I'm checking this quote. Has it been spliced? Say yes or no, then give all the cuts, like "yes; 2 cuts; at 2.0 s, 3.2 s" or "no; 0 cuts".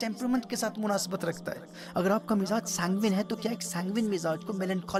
no; 0 cuts